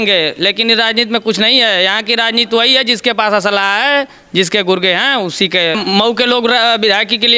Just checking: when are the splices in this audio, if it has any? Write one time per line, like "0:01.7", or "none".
0:05.8

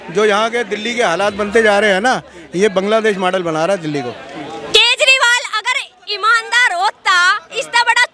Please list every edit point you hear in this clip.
0:04.7

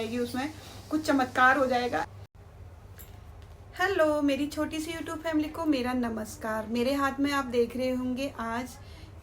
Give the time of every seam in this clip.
0:02.1

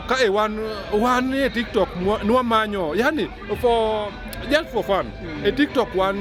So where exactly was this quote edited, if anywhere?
none

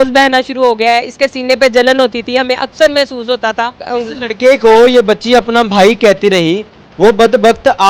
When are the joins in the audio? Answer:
0:03.8

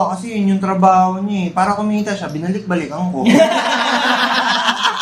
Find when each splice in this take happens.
none

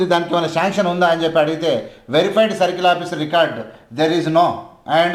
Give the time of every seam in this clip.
none

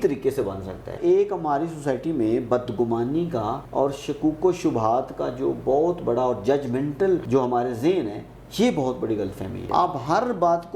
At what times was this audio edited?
0:01.0
0:03.6
0:07.2
0:09.6

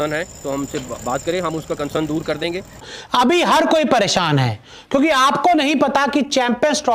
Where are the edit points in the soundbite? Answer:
0:02.9

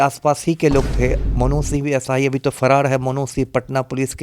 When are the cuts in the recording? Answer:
0:01.2

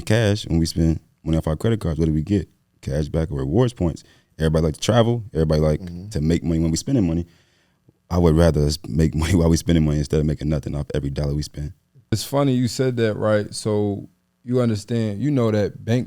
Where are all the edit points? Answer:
0:12.1

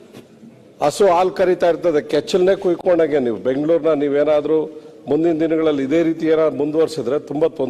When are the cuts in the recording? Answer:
none

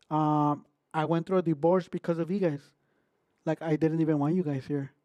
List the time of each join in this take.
none

